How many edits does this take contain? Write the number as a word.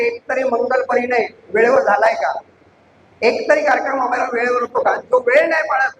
zero